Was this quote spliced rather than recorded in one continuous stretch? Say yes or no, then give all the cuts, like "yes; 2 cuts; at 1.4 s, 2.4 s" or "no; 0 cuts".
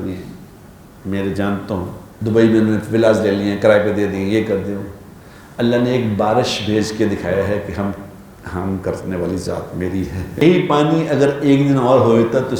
yes; 2 cuts; at 2.0 s, 10.4 s